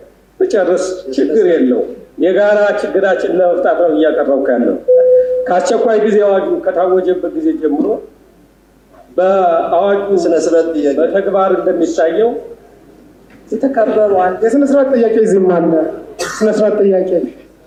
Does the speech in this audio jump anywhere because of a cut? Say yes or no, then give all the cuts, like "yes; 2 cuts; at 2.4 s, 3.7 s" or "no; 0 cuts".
no; 0 cuts